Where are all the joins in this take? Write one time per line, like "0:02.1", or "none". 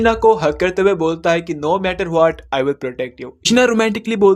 0:03.4